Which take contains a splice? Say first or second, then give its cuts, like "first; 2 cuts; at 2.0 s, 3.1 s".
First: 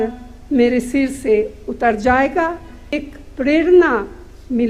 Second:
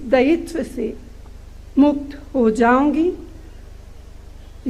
first; 1 cut; at 3.0 s